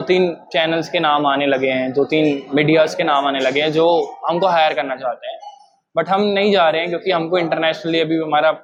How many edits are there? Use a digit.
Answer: 0